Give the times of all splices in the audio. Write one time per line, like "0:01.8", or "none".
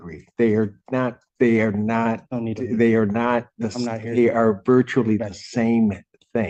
none

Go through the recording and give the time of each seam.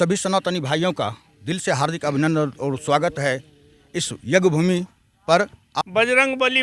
0:05.6

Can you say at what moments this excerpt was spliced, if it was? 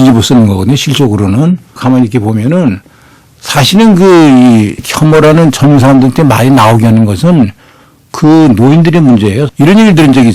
0:01.8
0:04.9
0:09.5

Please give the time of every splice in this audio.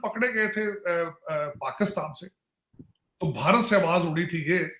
none

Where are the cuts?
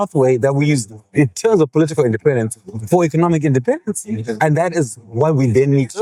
none

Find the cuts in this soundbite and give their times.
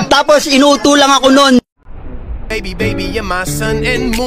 0:02.5

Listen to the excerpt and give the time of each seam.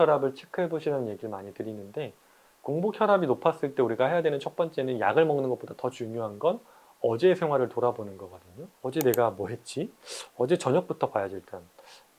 none

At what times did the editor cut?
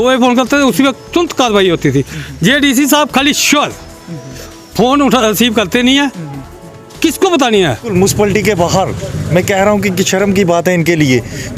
0:01.0
0:07.9

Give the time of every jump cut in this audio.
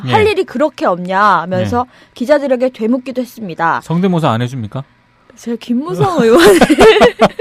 none

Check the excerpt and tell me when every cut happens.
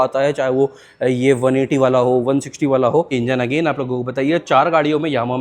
0:03.1

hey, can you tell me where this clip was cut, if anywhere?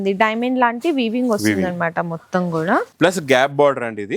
0:02.9

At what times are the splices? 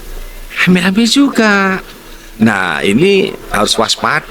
none

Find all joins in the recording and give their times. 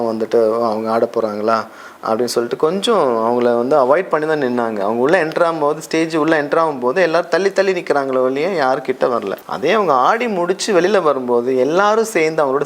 0:09.4

